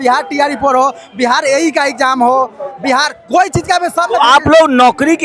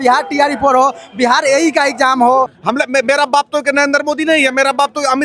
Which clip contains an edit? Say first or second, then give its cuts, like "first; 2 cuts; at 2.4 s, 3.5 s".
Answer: second; 1 cut; at 2.6 s